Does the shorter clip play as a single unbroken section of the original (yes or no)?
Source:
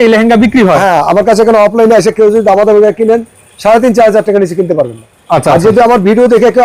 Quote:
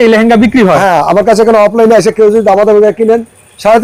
yes